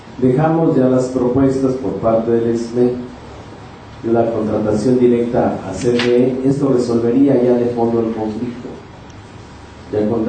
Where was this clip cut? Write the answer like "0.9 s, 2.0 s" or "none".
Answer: none